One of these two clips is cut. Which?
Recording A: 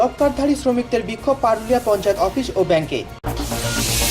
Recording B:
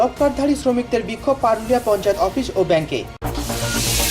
B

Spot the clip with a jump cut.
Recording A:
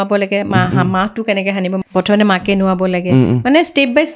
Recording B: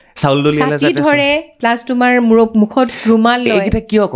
A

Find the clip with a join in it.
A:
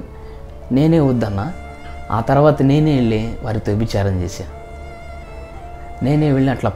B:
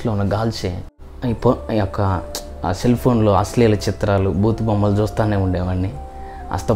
B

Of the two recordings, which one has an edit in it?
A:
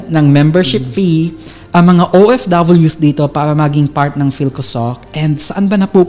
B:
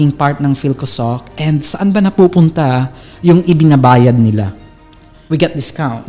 B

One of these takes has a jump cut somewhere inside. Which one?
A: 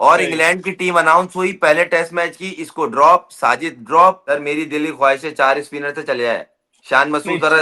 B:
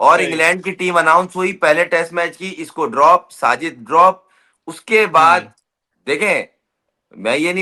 A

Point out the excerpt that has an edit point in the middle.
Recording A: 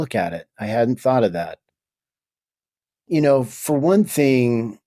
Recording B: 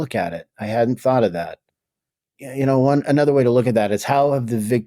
B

